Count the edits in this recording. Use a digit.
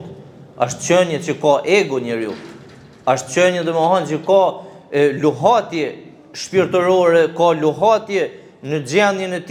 0